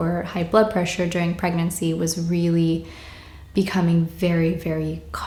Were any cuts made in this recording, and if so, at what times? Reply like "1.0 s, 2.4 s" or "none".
none